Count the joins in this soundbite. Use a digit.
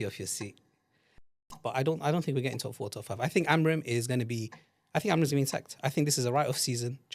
1